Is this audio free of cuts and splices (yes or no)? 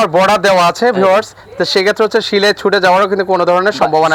yes